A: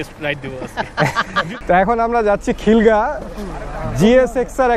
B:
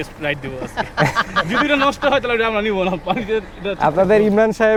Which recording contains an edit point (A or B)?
A